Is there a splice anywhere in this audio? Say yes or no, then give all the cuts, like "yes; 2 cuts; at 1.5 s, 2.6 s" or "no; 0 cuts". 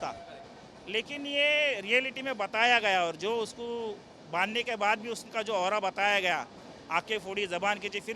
no; 0 cuts